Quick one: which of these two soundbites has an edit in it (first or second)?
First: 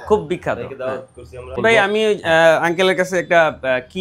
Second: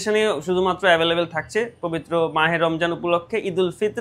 first